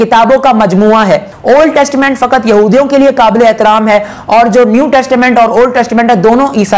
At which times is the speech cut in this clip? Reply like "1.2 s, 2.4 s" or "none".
1.3 s